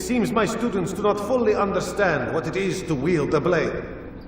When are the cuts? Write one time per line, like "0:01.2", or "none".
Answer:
0:00.9